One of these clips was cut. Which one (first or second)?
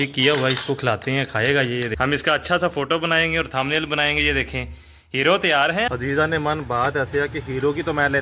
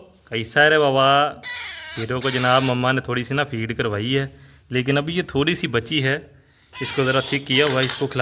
first